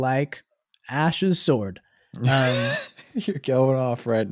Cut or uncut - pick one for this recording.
uncut